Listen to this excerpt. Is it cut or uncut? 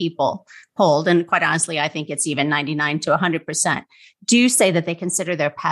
uncut